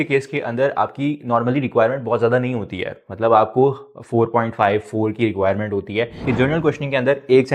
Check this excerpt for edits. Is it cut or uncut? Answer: cut